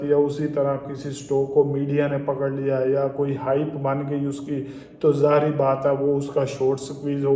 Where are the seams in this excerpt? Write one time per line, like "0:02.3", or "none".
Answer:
none

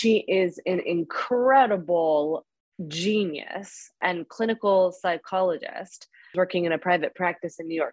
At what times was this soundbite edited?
0:04.0
0:06.3

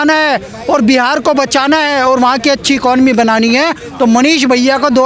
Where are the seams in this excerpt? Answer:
none

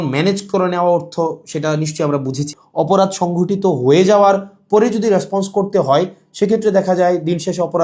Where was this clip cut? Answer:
0:02.5

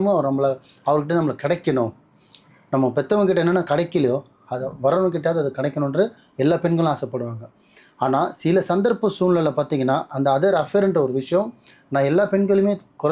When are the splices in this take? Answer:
none

